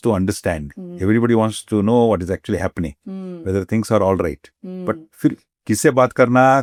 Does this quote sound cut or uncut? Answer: uncut